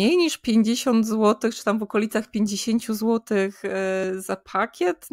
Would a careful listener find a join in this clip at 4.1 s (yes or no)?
yes